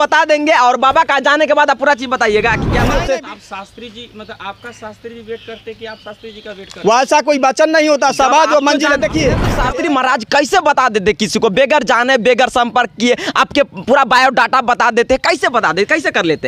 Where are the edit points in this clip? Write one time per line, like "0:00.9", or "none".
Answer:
0:03.0
0:09.5